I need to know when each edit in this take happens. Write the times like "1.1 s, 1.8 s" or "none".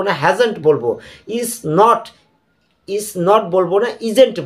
none